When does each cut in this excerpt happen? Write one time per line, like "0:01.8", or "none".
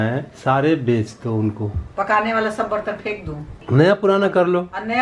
0:01.9
0:03.6